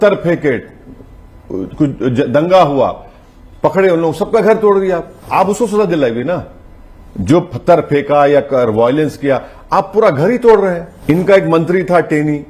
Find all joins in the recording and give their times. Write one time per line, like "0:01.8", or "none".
0:05.2
0:10.9